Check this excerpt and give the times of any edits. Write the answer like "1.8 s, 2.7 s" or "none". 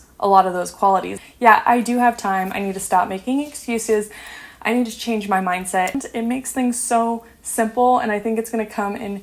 1.2 s, 5.9 s